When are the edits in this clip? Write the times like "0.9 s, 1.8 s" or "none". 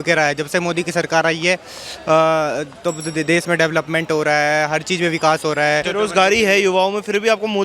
5.9 s